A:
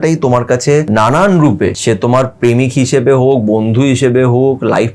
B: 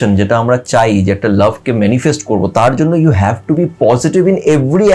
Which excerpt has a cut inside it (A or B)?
A